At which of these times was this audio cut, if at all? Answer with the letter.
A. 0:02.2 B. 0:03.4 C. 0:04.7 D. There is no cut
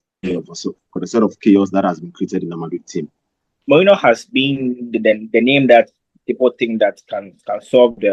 B